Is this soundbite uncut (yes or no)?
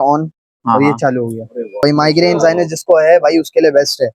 no